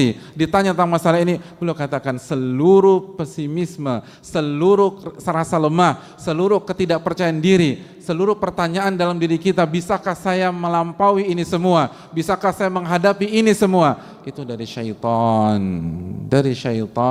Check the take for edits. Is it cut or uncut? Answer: uncut